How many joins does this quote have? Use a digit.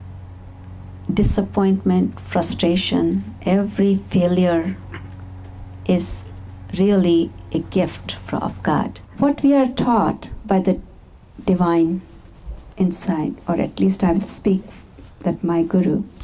1